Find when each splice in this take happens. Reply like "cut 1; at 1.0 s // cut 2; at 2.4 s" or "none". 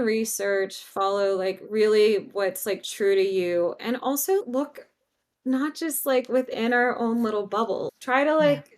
cut 1; at 4.4 s // cut 2; at 7.9 s